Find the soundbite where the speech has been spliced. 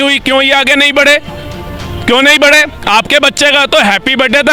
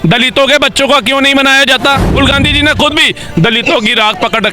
second; 1 cut; at 2.0 s

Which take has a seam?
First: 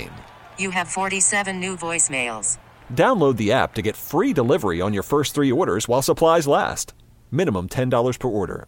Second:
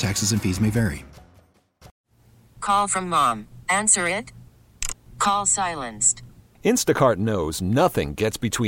second; 1 cut; at 2.0 s

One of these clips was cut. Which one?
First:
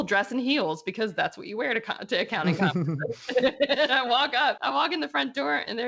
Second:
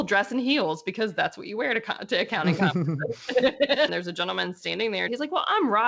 second; 2 cuts; at 3.9 s, 5.1 s

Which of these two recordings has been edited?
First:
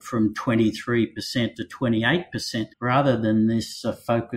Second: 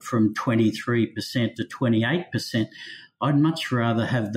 first; 1 cut; at 2.7 s

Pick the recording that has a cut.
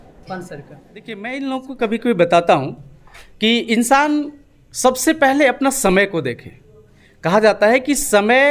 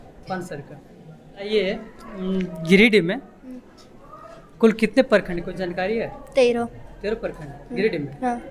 first; 1 cut; at 1.2 s

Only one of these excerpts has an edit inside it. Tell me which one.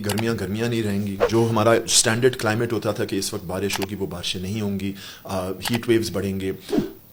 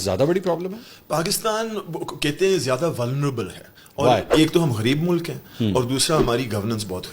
second; 1 cut; at 4.3 s

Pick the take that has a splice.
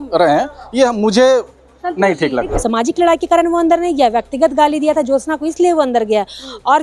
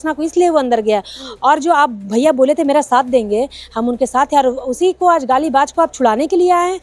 first; 1 cut; at 2.5 s

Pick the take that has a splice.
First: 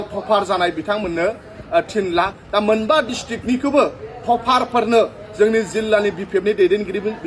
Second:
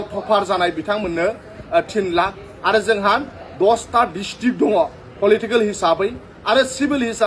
first; 1 cut; at 2.4 s

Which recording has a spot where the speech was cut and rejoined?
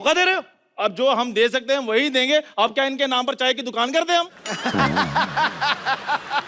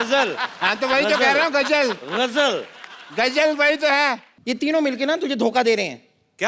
second; 1 cut; at 4.3 s

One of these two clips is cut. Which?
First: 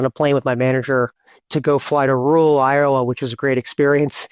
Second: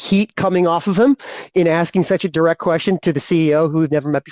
first; 1 cut; at 1.4 s

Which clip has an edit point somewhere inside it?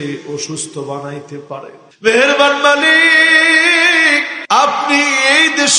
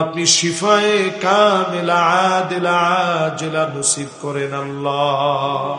first; 2 cuts; at 1.8 s, 4.3 s

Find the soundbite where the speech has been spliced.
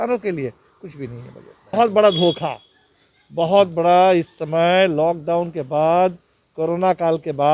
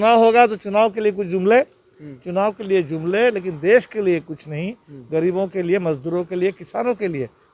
first; 1 cut; at 1.7 s

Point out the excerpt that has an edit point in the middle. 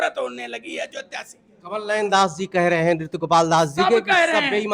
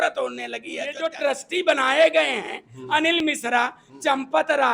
second; 1 cut; at 1.1 s

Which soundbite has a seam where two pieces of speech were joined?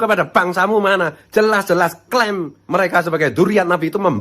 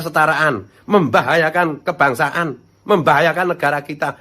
first; 1 cut; at 2.5 s

